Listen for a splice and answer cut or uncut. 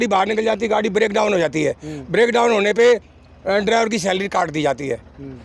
uncut